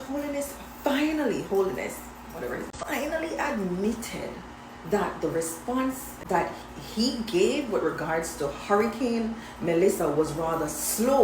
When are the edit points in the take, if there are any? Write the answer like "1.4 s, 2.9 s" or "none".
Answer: 2.7 s, 6.2 s